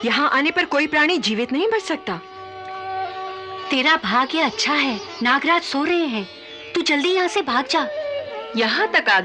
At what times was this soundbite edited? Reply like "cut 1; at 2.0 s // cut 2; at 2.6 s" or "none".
none